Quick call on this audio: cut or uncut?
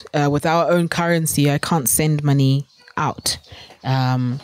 uncut